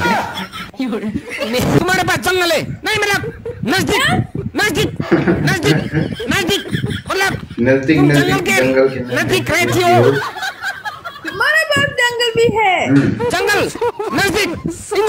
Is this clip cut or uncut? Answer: cut